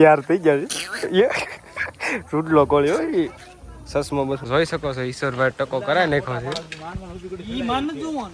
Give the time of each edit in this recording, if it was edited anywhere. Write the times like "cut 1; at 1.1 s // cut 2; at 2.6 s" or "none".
cut 1; at 4.4 s